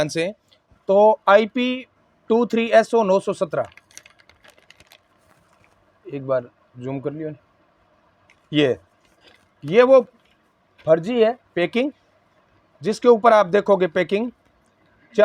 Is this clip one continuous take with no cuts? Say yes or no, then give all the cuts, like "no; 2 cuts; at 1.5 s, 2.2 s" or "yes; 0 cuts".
yes; 0 cuts